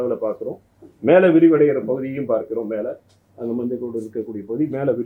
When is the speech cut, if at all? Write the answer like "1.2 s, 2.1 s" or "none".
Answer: none